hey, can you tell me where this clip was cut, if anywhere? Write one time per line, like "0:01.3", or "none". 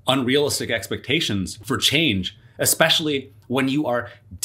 0:01.6